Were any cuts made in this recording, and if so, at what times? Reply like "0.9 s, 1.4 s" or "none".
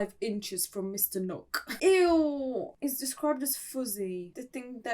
1.7 s